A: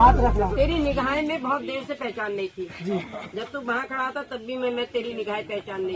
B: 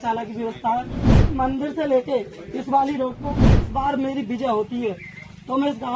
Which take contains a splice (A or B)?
B